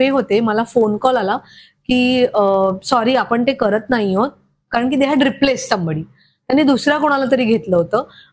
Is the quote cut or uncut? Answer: uncut